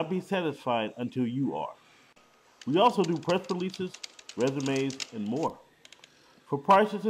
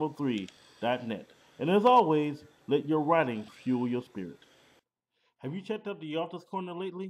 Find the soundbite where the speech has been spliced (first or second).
second